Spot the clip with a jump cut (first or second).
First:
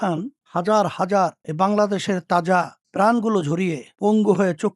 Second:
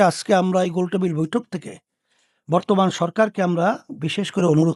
first